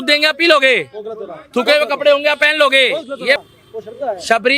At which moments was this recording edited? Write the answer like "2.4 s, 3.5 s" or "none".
3.5 s

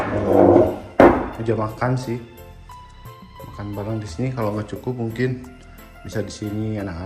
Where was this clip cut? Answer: none

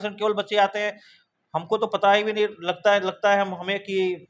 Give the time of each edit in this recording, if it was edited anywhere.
none

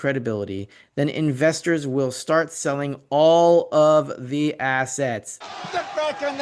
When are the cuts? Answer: 5.4 s

